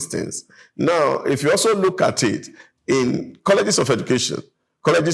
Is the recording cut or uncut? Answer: uncut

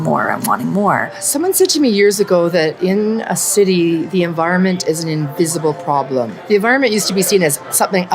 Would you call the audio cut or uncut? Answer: cut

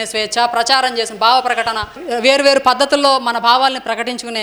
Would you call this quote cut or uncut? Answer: cut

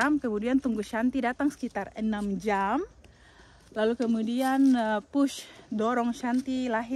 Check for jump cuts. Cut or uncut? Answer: uncut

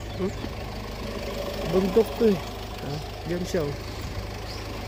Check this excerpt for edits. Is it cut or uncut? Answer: uncut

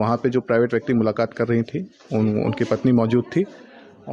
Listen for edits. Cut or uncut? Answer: uncut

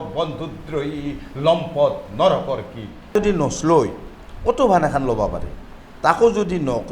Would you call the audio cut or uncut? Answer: cut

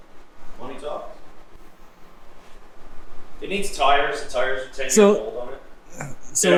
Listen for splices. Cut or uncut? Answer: uncut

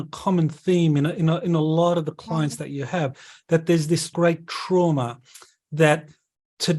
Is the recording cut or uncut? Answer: cut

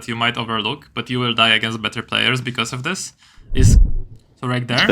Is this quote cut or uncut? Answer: cut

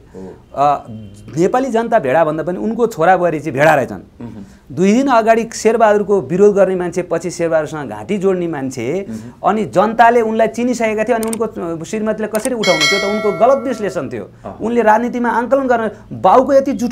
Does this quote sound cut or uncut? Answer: uncut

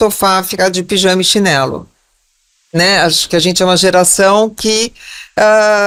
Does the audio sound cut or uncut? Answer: uncut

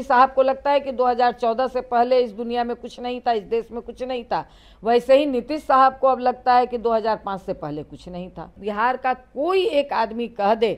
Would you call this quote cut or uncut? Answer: cut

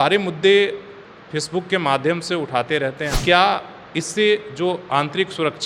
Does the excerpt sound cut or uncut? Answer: cut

